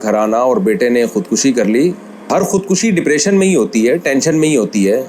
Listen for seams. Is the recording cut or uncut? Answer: cut